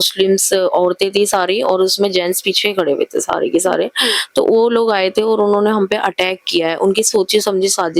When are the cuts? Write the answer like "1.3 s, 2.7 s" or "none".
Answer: none